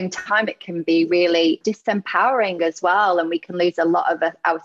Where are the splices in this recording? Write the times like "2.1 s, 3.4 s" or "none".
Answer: 1.6 s

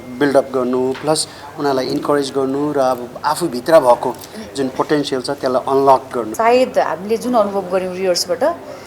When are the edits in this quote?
6.3 s

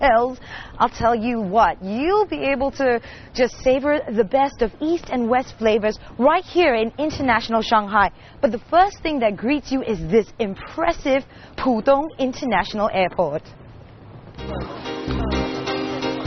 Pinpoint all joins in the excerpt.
5.2 s

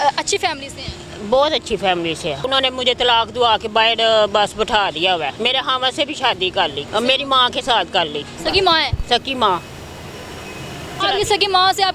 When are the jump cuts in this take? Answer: 2.5 s, 5.3 s, 6.8 s, 8.4 s, 11.0 s

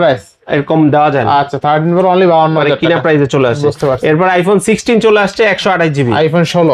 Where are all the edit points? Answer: none

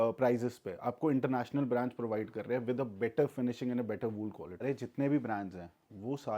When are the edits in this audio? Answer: 4.6 s

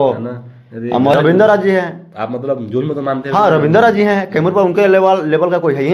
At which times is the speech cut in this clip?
1.1 s

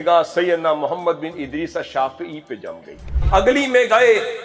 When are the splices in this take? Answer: 3.2 s

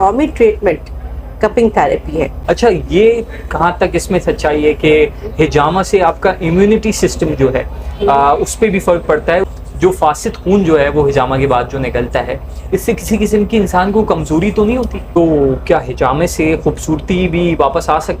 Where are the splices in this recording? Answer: 2.4 s, 9.4 s, 15.2 s

